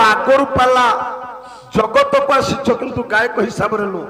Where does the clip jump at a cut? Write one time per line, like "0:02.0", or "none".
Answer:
none

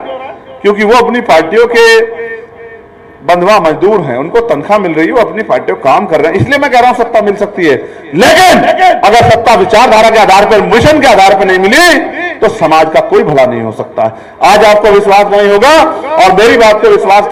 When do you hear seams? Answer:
none

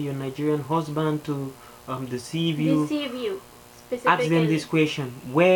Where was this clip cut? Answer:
none

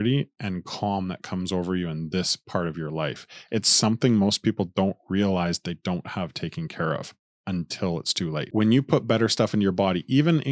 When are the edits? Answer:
0:08.5

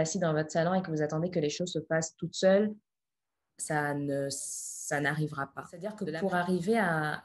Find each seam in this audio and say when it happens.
0:06.0

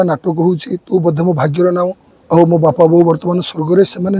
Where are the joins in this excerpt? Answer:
0:02.1

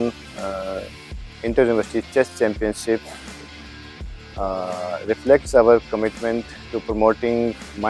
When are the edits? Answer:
none

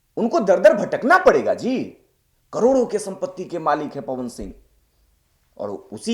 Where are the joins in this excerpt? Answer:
none

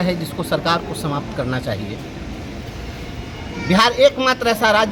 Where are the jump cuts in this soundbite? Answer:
none

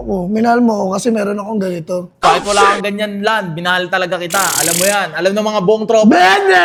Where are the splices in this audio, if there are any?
none

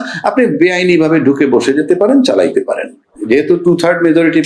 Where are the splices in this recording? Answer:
0:03.2

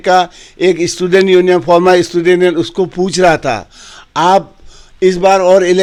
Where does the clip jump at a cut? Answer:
none

